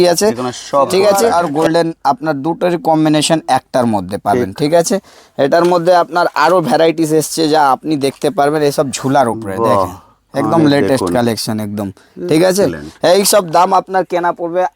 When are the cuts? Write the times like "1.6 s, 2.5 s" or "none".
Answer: 1.3 s